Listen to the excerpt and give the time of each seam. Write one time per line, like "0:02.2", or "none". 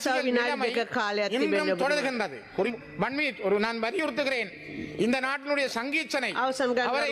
0:02.7

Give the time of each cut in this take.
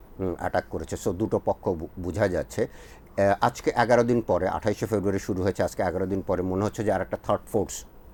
none

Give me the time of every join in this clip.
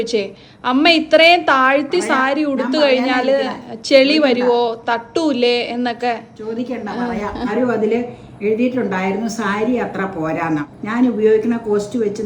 0:07.5
0:10.8

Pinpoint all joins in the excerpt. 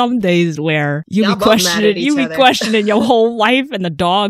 0:01.0

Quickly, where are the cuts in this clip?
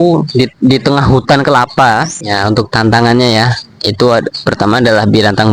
0:02.2

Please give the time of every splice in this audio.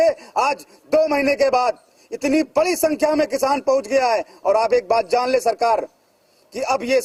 none

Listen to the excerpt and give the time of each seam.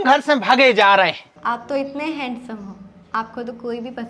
0:01.1

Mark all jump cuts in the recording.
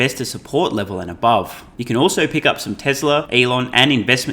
0:01.7
0:03.3

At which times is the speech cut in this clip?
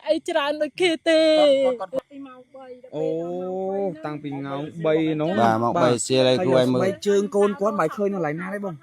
0:02.0

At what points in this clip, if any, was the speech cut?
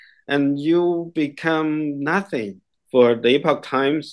0:02.7

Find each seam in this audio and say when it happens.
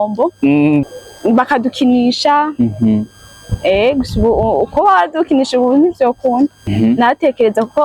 0:00.8
0:06.6

